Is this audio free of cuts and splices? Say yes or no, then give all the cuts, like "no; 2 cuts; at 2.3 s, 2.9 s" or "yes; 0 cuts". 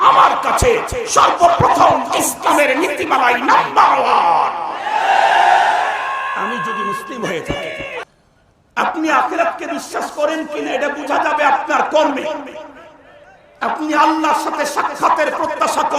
no; 1 cut; at 8.1 s